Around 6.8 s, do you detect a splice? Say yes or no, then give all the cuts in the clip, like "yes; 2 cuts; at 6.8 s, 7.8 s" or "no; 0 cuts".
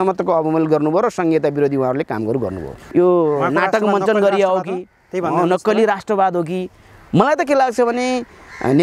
no; 1 cut; at 2.8 s